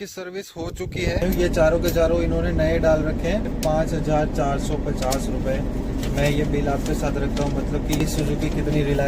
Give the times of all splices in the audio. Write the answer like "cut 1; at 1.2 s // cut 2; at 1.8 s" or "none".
cut 1; at 1.2 s // cut 2; at 3.5 s // cut 3; at 8.0 s